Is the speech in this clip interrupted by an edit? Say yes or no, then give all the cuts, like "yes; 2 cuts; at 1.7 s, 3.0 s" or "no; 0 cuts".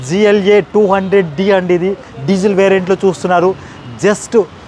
no; 0 cuts